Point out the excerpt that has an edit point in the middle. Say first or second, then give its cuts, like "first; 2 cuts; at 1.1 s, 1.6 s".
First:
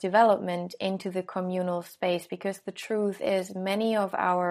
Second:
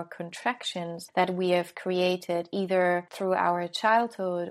second; 2 cuts; at 1.0 s, 3.1 s